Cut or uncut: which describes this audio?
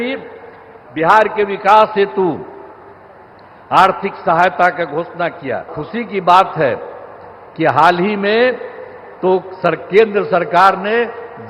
cut